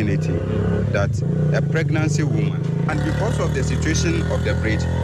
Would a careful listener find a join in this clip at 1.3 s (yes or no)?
no